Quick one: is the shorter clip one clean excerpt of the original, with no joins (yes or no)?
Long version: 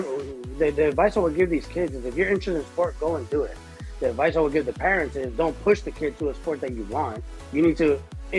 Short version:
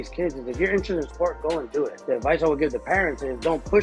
no